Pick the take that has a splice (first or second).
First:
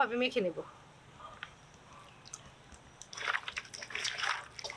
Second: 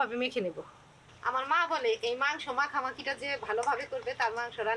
second